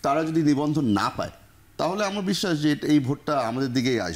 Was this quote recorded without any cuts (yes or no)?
yes